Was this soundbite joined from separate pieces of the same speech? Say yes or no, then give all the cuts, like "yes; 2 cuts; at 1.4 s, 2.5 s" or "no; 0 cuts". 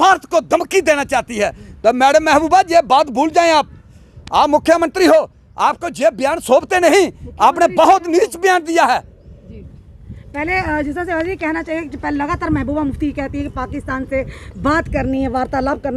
no; 0 cuts